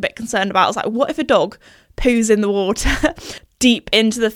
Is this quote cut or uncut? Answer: cut